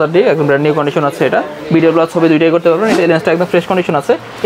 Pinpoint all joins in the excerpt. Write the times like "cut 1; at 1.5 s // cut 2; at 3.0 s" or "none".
cut 1; at 3.0 s

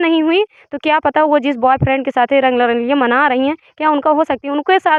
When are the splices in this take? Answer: none

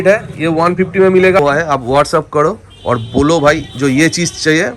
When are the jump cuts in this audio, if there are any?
cut 1; at 1.4 s

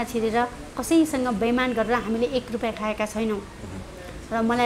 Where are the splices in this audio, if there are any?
none

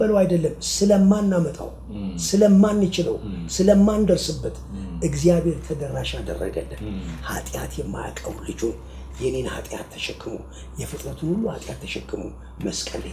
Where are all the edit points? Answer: none

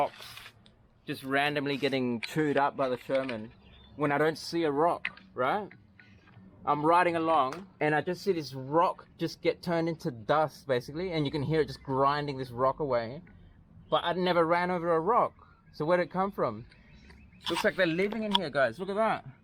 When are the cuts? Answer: cut 1; at 7.6 s

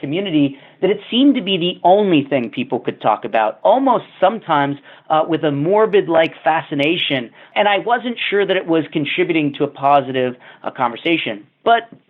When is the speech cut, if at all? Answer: cut 1; at 3.6 s // cut 2; at 7.5 s

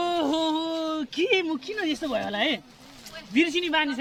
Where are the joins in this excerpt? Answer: none

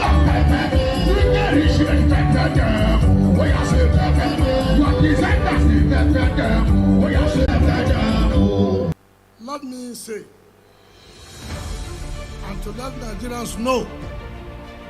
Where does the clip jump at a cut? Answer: cut 1; at 7.5 s

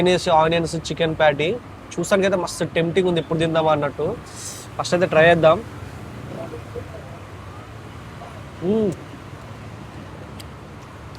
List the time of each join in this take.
none

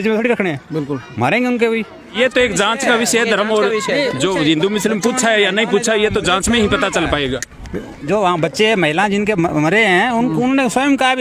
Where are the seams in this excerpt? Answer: cut 1; at 2.2 s

